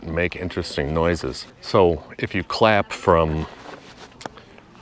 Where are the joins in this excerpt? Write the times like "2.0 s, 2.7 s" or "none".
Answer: 1.5 s